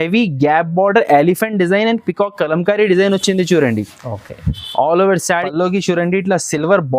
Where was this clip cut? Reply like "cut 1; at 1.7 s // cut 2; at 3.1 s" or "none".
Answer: cut 1; at 5.2 s